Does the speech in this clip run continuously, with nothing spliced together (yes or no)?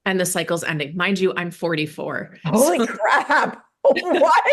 yes